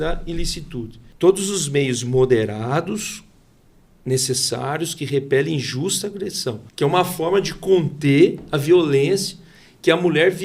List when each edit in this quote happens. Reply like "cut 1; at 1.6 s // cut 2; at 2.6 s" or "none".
cut 1; at 1.0 s // cut 2; at 6.7 s